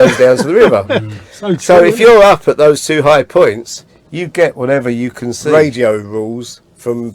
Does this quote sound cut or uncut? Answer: cut